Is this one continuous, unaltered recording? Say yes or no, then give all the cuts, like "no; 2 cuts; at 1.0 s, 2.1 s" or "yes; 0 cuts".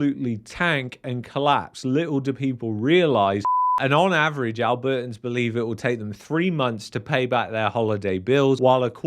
no; 1 cut; at 3.6 s